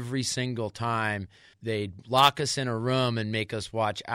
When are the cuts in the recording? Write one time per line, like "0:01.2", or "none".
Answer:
0:01.5